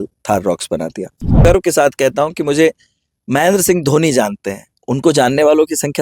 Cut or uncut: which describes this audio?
cut